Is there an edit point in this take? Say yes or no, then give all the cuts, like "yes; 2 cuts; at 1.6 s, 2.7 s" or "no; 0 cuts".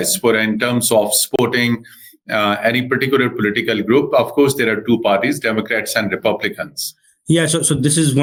no; 0 cuts